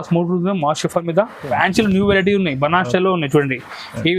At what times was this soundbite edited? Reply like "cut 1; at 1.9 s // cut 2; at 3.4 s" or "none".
cut 1; at 1.5 s